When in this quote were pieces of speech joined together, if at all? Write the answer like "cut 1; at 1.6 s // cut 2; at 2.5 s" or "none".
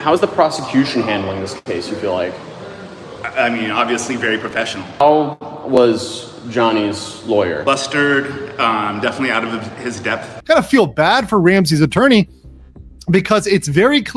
cut 1; at 4.9 s // cut 2; at 10.4 s